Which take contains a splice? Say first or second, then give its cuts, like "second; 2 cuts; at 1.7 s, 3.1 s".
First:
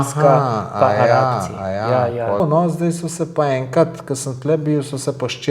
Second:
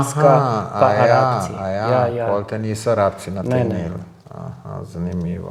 first; 1 cut; at 2.4 s